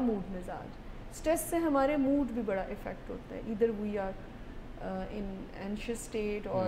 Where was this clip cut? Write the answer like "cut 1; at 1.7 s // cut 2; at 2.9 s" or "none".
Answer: none